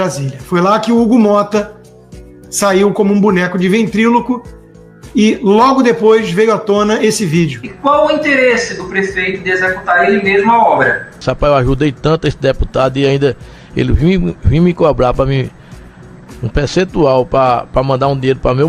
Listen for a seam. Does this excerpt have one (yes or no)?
yes